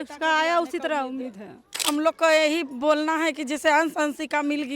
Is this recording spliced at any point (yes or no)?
yes